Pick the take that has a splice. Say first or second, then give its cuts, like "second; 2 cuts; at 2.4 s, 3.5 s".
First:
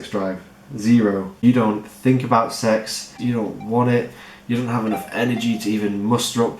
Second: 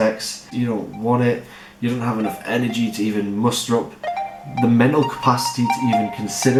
first; 1 cut; at 1.4 s